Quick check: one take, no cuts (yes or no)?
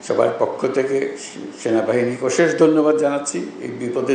yes